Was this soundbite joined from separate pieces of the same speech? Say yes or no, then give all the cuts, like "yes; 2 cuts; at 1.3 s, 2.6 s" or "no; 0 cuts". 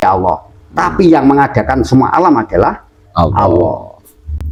no; 0 cuts